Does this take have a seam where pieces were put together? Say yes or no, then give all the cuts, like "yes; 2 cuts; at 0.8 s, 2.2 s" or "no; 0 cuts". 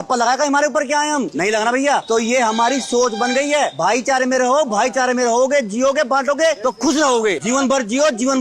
no; 0 cuts